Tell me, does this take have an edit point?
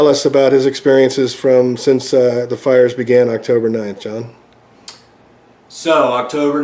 yes; 1 cut; at 2.4 s

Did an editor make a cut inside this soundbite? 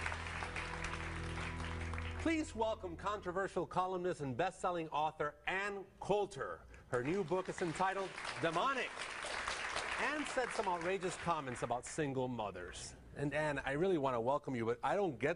yes; 1 cut; at 11.5 s

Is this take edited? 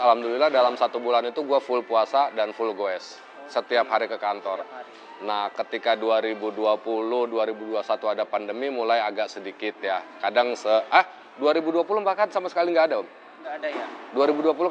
no; 0 cuts

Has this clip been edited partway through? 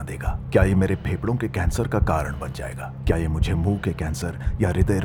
no; 0 cuts

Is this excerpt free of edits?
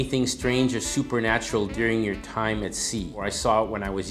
no; 1 cut; at 3.2 s

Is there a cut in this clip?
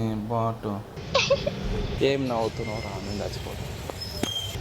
yes; 2 cuts; at 0.9 s, 1.9 s

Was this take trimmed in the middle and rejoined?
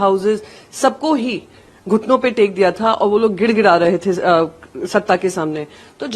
no; 0 cuts

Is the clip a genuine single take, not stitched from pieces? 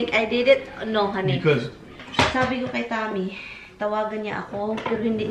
no; 1 cut; at 2.0 s

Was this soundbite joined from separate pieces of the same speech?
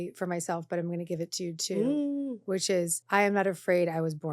yes; 1 cut; at 3.0 s

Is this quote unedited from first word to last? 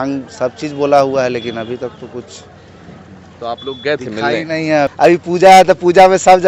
yes; 0 cuts

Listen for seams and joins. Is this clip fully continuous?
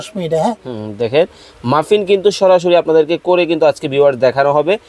yes; 0 cuts

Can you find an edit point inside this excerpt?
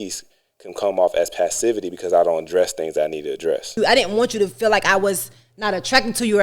yes; 1 cut; at 3.7 s

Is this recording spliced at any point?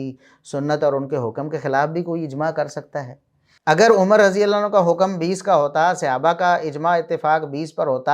yes; 1 cut; at 3.5 s

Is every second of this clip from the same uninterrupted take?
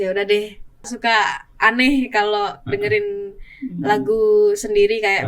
no; 1 cut; at 0.9 s

